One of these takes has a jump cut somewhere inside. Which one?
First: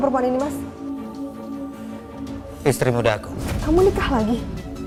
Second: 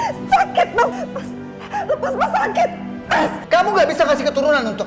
second; 1 cut; at 3.4 s

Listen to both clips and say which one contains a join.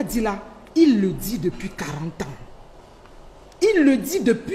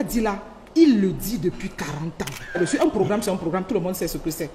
second; 1 cut; at 2.6 s

